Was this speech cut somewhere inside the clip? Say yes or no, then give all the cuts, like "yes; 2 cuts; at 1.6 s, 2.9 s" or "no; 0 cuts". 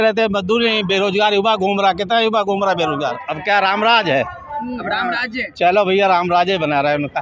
yes; 1 cut; at 3.3 s